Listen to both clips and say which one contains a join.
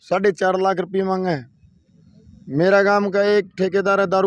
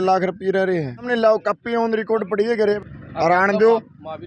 second; 2 cuts; at 1.1 s, 2.8 s

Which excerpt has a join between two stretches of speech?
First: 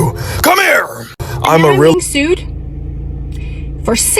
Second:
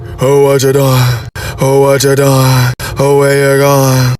first; 1 cut; at 1.9 s

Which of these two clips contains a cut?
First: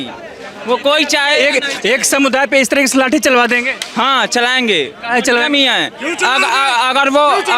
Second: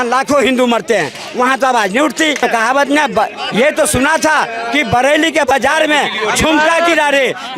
second; 1 cut; at 2.4 s

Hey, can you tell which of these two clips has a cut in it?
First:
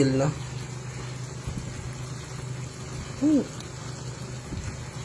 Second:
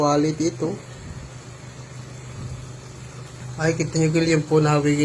second; 1 cut; at 3.4 s

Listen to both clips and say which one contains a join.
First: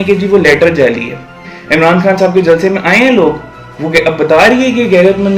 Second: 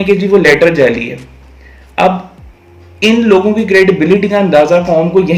first; 1 cut; at 1.5 s

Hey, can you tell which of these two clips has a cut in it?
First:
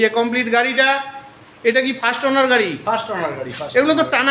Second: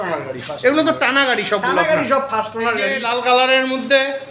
second; 1 cut; at 2.9 s

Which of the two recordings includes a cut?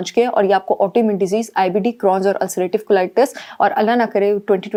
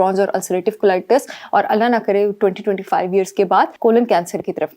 second; 1 cut; at 3.7 s

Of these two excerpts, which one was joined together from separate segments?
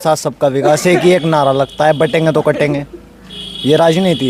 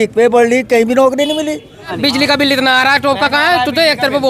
second; 1 cut; at 1.9 s

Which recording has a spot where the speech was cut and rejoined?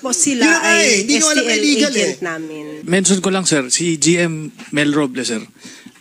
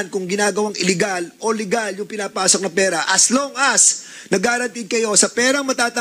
first; 1 cut; at 2.8 s

